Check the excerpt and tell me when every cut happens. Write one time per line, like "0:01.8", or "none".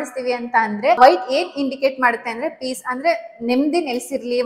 0:01.0